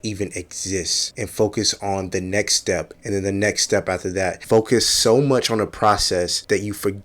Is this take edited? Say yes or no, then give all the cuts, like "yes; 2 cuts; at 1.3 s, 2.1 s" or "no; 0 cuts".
yes; 2 cuts; at 1.0 s, 4.4 s